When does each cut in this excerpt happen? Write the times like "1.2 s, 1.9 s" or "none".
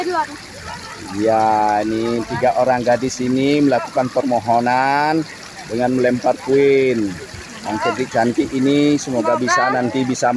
none

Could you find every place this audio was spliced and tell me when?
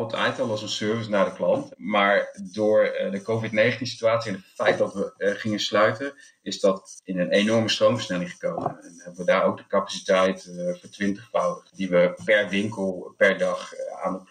1.7 s, 11.7 s

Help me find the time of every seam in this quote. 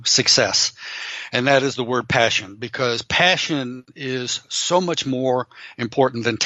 none

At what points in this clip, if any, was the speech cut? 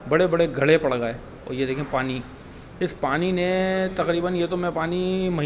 none

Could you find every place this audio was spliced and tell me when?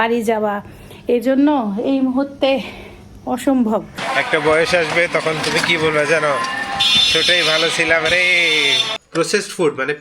4.0 s, 8.9 s

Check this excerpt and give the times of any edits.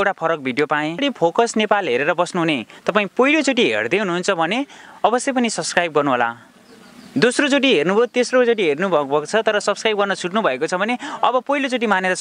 1.0 s

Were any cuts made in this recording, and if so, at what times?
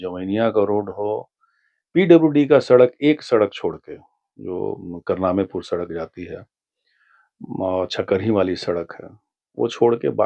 none

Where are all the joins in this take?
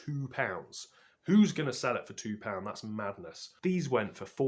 3.5 s

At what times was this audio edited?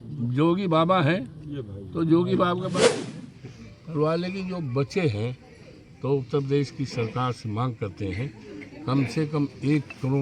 3.0 s

